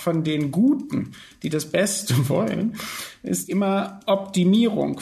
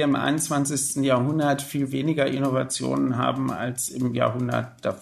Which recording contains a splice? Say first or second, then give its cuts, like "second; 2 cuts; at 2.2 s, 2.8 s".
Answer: first; 1 cut; at 3.5 s